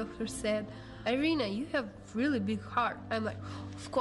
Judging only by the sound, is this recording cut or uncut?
cut